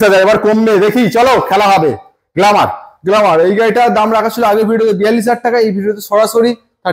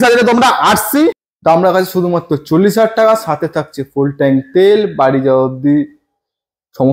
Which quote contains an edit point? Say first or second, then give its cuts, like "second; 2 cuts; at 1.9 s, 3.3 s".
second; 1 cut; at 1.3 s